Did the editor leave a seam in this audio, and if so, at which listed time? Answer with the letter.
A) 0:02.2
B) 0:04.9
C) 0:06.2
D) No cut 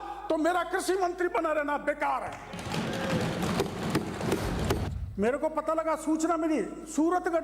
B